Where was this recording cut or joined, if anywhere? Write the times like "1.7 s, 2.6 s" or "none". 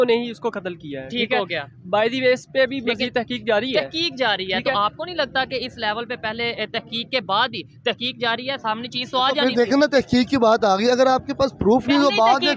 none